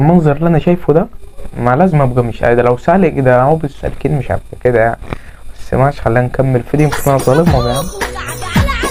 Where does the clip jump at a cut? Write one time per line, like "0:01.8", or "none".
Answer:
none